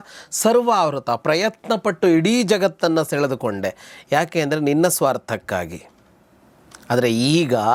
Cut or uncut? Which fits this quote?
uncut